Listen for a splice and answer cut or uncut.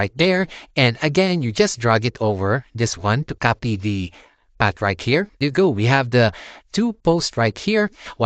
cut